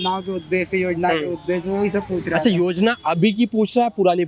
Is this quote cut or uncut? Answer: uncut